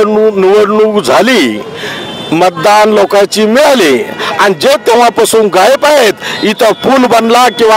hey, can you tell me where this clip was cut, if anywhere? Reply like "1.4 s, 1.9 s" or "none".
none